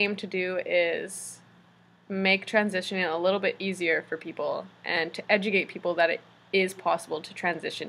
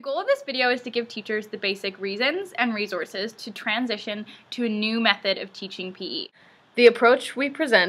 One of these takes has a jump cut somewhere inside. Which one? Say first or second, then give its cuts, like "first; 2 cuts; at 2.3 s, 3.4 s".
second; 1 cut; at 6.3 s